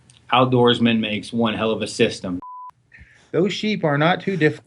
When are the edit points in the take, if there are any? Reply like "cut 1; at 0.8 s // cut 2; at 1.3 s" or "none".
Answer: cut 1; at 2.4 s